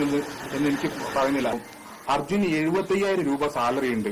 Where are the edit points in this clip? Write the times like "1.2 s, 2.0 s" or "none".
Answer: 1.7 s